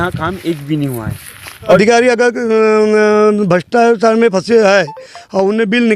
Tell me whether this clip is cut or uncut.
cut